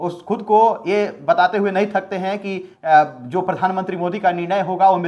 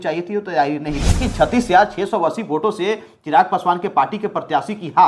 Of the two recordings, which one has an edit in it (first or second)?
second